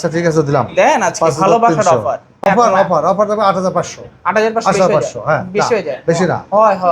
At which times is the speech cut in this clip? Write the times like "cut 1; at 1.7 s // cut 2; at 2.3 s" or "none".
cut 1; at 2.4 s